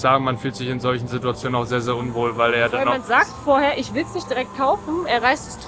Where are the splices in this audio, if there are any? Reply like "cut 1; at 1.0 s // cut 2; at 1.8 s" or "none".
none